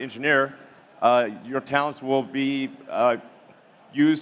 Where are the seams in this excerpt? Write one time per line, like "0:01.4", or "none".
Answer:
none